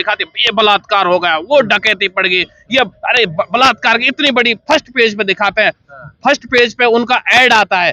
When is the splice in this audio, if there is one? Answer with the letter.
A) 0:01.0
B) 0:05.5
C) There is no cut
C